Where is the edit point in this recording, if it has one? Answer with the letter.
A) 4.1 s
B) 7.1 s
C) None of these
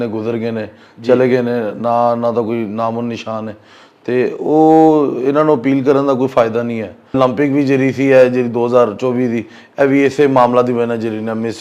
B